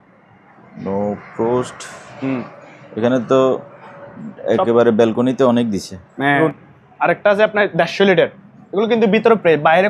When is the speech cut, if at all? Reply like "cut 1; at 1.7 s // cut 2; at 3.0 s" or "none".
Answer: cut 1; at 6.4 s